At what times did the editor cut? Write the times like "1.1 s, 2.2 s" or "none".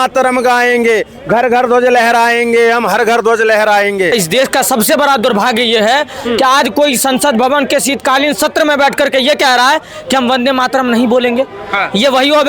4.1 s